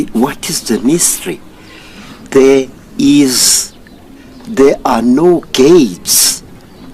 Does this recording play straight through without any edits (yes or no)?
yes